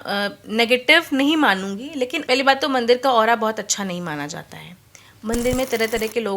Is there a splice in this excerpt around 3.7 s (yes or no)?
no